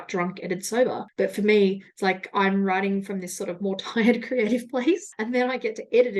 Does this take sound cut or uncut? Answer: uncut